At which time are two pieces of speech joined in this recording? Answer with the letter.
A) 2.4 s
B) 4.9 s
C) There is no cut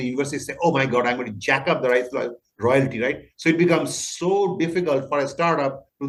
C